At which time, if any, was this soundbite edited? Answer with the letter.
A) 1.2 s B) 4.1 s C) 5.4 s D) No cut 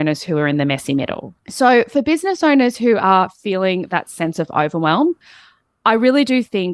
A